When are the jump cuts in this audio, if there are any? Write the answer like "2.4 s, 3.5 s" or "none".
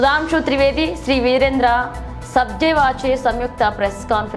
none